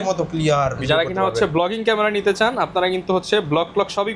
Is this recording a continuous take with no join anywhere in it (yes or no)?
yes